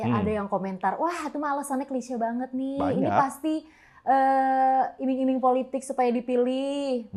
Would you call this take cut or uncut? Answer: uncut